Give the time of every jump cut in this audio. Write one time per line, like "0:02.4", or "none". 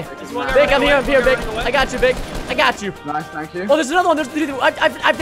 none